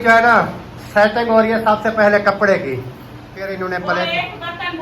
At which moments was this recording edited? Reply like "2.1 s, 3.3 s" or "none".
3.4 s